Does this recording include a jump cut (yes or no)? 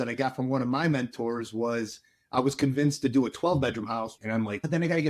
yes